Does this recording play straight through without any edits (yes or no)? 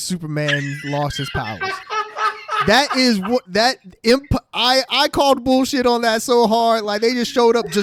yes